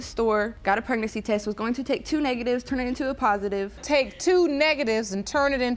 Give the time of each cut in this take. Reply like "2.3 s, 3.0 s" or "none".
none